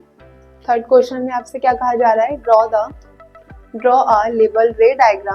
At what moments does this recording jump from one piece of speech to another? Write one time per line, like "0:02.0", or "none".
none